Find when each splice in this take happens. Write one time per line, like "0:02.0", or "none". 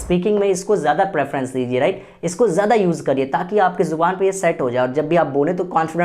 none